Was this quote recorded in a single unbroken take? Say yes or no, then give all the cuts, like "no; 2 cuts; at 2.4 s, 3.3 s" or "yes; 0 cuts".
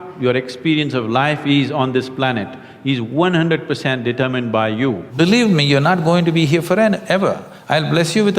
no; 1 cut; at 5.1 s